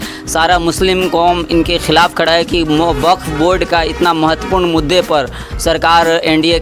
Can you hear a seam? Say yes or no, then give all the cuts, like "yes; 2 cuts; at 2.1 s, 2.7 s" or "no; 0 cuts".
no; 0 cuts